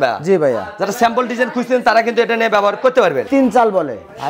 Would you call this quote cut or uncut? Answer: cut